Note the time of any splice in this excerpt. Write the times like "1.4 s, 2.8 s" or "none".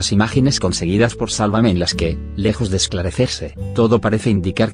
1.9 s